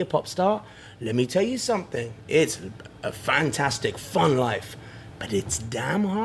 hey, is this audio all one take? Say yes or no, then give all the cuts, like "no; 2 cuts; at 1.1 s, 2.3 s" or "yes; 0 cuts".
yes; 0 cuts